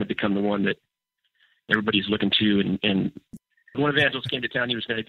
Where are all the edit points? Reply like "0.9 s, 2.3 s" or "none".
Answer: 3.4 s

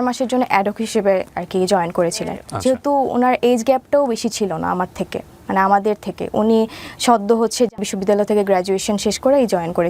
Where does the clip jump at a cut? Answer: 2.4 s, 7.8 s

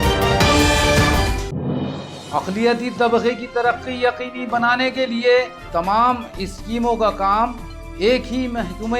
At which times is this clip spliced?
none

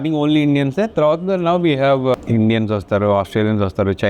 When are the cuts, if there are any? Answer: 2.1 s

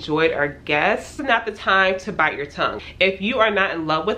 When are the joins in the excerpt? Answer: 1.1 s, 2.8 s

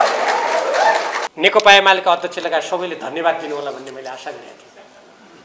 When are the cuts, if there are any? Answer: 1.2 s

